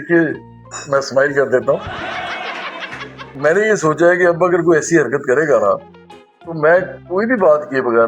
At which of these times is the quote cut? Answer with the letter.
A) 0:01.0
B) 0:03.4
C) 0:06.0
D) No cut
D